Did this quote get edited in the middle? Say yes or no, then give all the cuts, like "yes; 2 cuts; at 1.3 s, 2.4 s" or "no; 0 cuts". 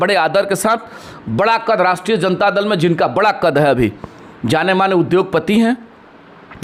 no; 0 cuts